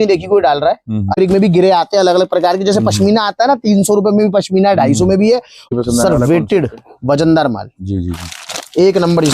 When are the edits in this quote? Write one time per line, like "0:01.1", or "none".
0:01.1
0:05.7